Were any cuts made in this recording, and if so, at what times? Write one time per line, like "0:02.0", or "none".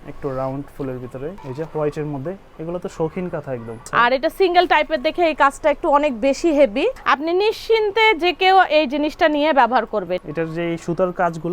0:01.4
0:03.8
0:07.0
0:10.2